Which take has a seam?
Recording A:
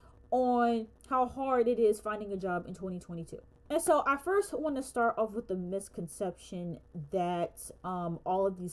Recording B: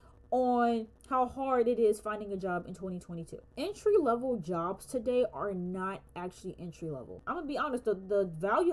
B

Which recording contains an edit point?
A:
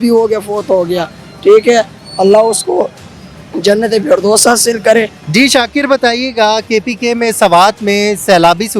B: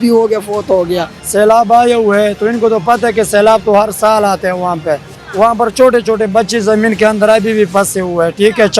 B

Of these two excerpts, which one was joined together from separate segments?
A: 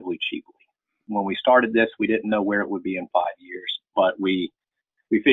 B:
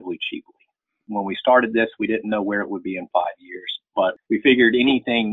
B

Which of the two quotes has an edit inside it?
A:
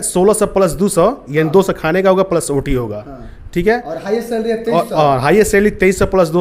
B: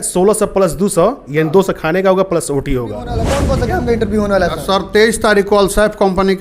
B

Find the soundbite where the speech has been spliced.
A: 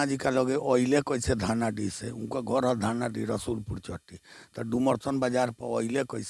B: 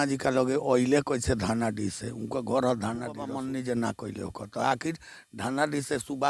B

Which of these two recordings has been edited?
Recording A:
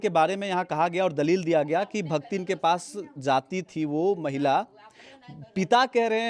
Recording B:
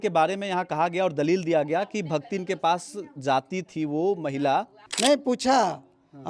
B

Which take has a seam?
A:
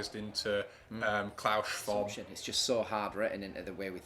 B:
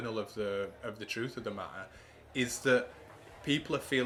A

